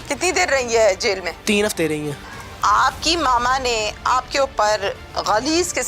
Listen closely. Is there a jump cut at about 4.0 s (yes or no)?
no